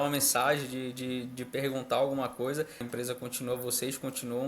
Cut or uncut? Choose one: cut